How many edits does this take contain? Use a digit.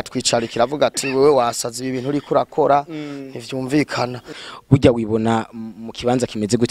1